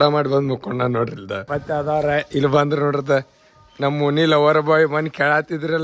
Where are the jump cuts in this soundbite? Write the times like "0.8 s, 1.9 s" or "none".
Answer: 1.4 s